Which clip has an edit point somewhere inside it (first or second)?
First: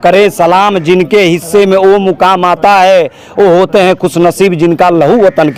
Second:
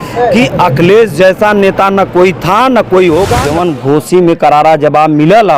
second